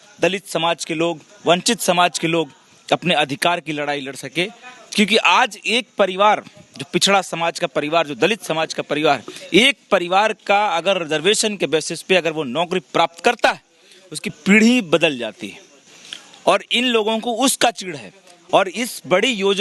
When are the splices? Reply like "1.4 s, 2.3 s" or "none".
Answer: none